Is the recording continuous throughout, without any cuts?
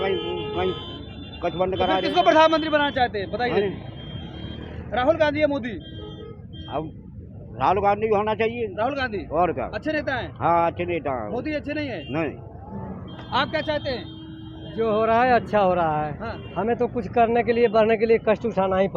yes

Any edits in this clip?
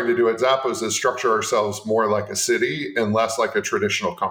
no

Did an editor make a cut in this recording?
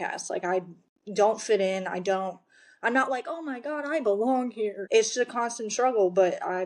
yes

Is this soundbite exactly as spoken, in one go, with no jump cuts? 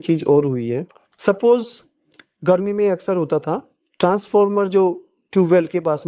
yes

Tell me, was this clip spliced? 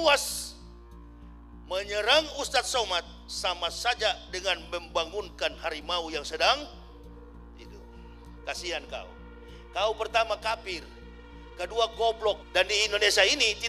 yes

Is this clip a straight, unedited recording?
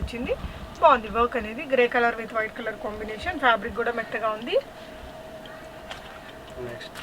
yes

